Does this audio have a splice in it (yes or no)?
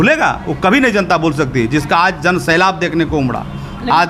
no